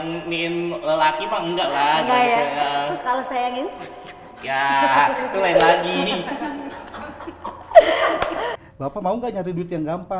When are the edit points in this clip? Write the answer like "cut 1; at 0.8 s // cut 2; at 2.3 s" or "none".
cut 1; at 8.6 s